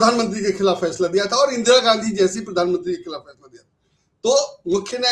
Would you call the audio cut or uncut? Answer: uncut